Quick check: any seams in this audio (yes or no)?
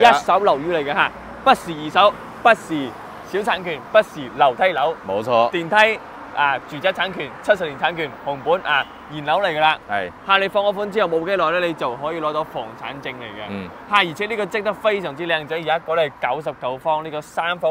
no